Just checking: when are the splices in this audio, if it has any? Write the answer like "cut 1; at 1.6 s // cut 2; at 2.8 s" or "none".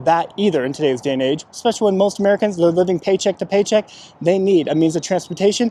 none